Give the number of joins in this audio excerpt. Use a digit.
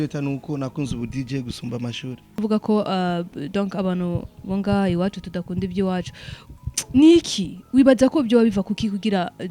1